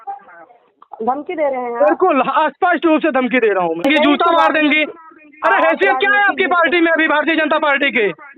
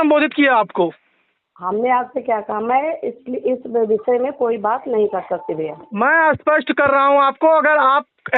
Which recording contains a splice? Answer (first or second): first